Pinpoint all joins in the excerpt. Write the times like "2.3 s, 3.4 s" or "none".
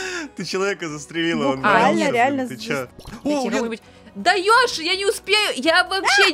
3.0 s